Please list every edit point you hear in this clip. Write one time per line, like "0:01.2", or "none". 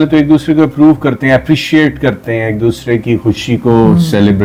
none